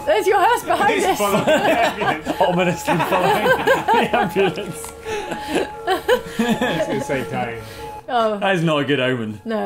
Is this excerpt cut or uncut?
uncut